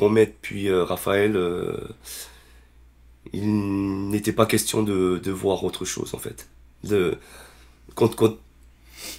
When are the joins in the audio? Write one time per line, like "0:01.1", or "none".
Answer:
none